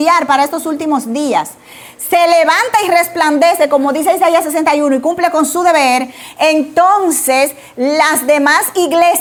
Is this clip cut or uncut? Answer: uncut